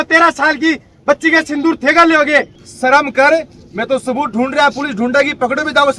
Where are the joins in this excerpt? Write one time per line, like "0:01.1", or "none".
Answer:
0:02.6